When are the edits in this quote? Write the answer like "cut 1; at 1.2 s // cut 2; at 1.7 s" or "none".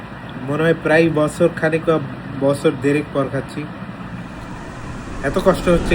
none